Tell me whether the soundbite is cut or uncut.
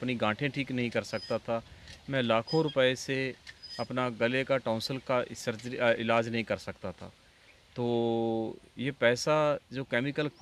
uncut